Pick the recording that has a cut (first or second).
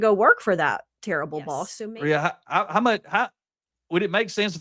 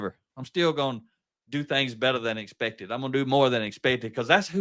first